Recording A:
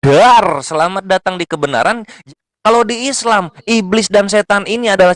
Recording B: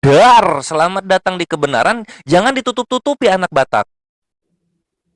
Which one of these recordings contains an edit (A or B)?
A